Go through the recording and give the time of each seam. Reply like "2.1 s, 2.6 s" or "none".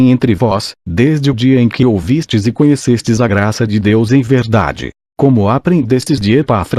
2.8 s